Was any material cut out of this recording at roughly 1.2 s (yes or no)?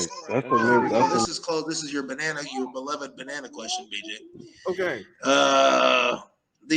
yes